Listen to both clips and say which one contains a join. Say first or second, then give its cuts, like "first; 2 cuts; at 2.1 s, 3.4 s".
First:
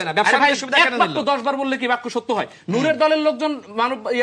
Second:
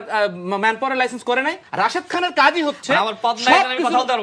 second; 1 cut; at 1.6 s